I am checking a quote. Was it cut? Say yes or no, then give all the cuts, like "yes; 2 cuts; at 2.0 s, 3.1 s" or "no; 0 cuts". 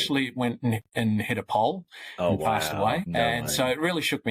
yes; 1 cut; at 3.1 s